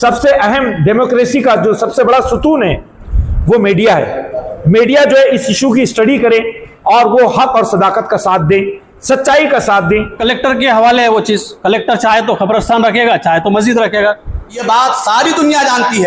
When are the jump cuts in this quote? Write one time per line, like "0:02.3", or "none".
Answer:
0:10.2
0:14.6